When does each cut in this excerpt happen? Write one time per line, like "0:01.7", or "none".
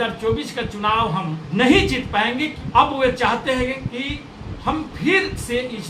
0:01.4
0:02.6